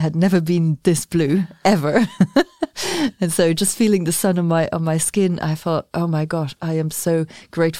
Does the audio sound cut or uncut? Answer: uncut